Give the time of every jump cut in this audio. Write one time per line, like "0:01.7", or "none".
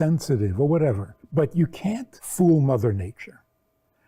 0:01.1
0:02.2